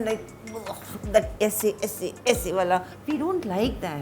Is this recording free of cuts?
no; 2 cuts; at 1.3 s, 2.9 s

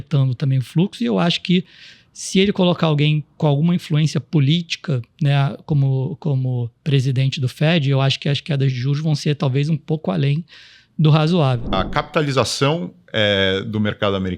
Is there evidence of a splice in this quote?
yes; 1 cut; at 11.7 s

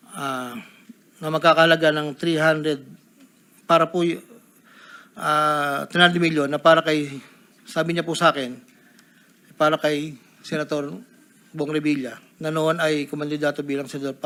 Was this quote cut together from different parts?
no; 0 cuts

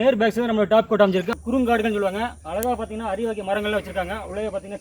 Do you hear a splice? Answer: yes; 1 cut; at 1.4 s

